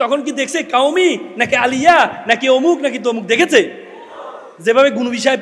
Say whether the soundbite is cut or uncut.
uncut